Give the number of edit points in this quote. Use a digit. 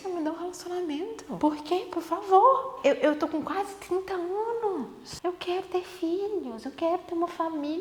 3